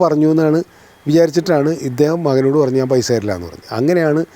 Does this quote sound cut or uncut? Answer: uncut